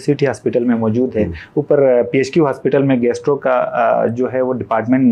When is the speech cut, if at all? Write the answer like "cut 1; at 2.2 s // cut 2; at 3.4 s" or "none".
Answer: none